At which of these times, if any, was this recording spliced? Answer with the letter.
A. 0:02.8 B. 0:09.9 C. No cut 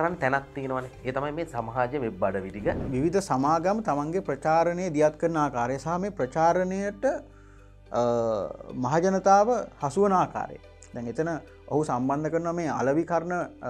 A